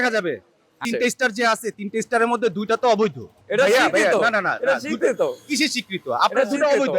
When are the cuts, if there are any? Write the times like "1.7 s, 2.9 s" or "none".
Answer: 0.8 s, 3.4 s